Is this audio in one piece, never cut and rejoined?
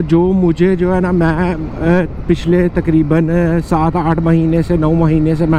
yes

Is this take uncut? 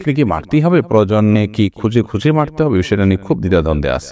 no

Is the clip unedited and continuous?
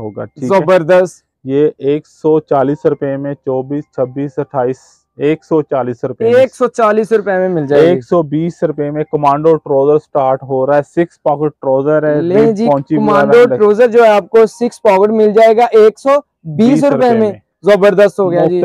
yes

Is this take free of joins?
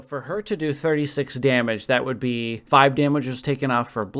no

